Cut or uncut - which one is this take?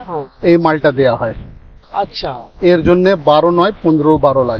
uncut